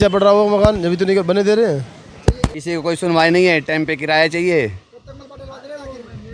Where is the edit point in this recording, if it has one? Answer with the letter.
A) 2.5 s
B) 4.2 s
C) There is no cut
A